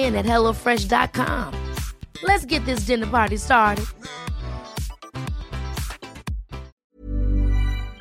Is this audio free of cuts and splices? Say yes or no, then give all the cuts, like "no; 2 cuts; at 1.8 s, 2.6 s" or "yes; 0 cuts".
no; 1 cut; at 6.7 s